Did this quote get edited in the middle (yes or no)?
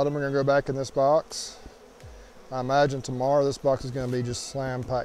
no